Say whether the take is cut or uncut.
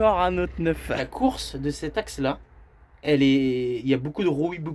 cut